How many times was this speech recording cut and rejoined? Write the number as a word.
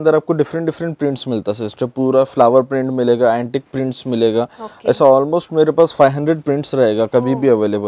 zero